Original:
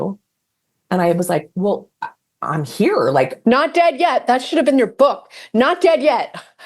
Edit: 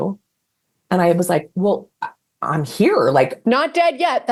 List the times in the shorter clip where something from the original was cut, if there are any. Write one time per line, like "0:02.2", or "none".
none